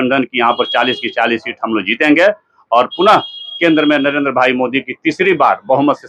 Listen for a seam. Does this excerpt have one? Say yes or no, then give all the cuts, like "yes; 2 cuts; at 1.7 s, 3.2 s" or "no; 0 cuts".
no; 0 cuts